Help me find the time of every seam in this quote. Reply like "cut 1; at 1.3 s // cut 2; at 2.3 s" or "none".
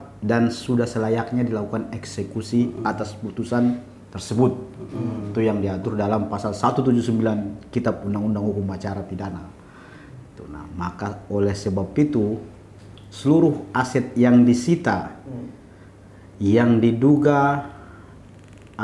none